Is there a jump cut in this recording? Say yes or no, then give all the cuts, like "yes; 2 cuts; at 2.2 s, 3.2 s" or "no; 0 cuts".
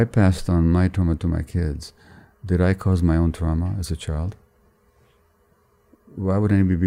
yes; 1 cut; at 0.9 s